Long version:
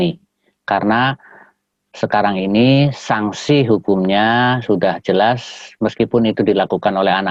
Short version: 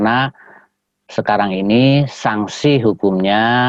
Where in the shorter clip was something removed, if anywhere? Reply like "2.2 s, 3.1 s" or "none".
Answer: none